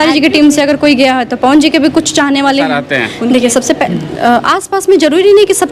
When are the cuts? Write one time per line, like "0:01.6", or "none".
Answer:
0:02.8

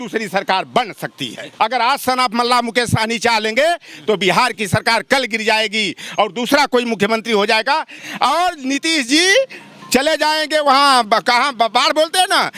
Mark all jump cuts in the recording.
0:01.4
0:08.0

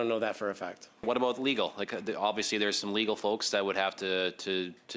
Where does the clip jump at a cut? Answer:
0:01.0

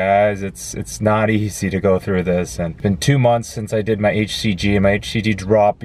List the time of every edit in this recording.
0:02.7

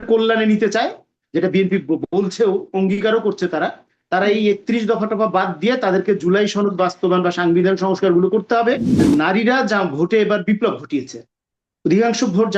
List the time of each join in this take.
0:09.0

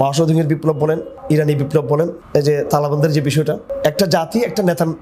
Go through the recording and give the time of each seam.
0:01.1
0:02.2
0:03.7

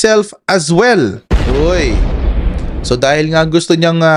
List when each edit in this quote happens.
none

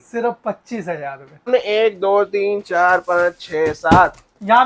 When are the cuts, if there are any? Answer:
0:01.4

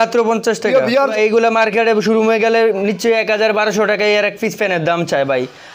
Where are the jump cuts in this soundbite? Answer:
0:01.1

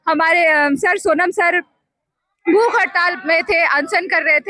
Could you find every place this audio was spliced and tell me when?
none

